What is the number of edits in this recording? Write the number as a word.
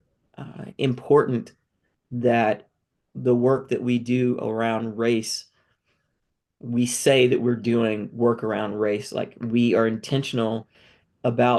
zero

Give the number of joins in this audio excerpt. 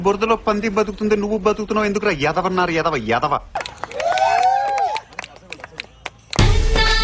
one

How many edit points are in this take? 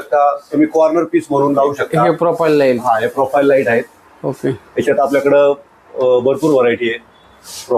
zero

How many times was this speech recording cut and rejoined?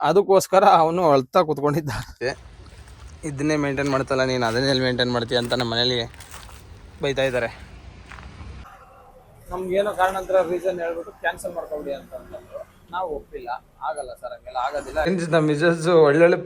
three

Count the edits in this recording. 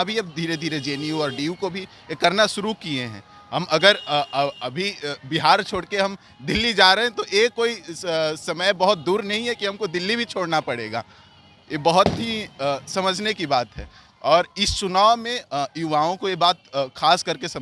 zero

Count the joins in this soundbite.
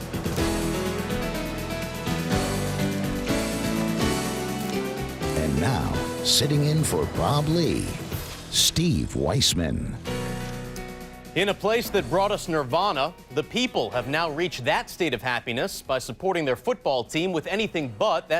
zero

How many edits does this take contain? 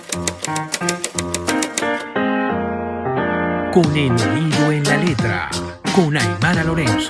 zero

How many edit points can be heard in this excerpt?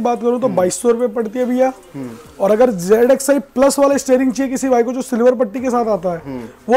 zero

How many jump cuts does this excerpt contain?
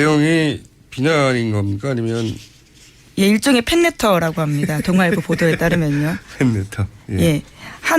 one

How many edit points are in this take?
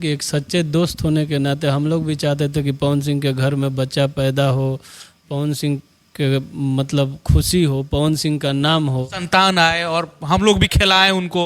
zero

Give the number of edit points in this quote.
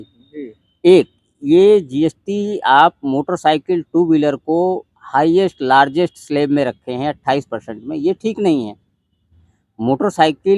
zero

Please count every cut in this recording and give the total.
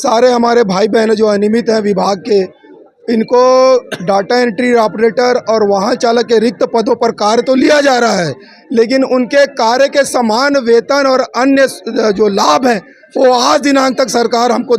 zero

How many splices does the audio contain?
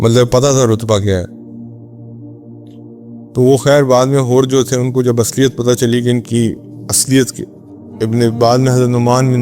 two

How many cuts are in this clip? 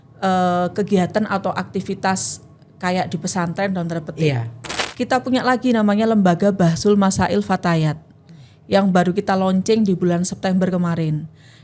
one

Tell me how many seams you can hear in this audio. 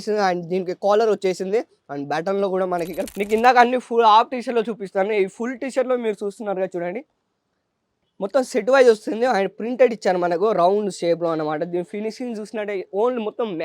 one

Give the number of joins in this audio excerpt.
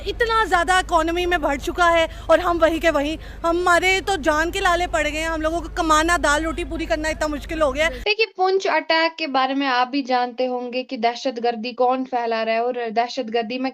one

